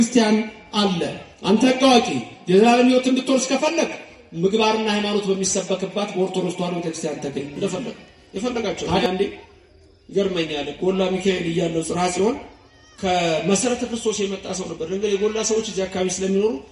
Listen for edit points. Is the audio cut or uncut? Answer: cut